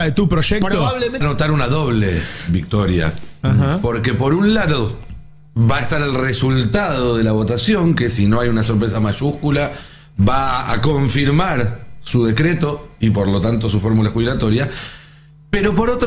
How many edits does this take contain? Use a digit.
1